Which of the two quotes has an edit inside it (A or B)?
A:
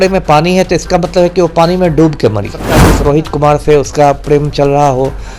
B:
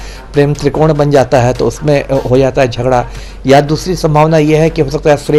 A